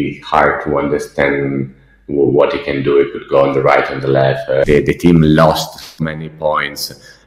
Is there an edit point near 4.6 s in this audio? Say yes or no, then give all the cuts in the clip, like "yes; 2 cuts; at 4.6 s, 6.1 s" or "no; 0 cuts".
yes; 1 cut; at 4.6 s